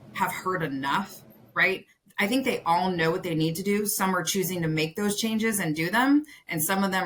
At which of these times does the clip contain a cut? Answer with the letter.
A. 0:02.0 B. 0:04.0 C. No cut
C